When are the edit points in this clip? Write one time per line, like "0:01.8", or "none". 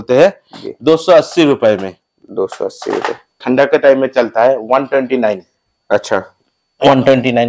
0:03.4